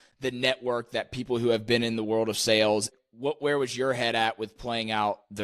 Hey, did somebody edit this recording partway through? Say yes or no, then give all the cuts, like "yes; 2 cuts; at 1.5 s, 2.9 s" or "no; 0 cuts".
yes; 1 cut; at 2.9 s